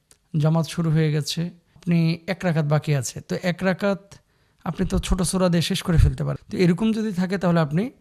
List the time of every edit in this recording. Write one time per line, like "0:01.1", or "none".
0:01.7
0:06.3